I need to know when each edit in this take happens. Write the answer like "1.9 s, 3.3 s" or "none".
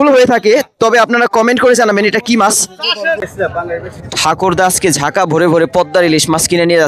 3.2 s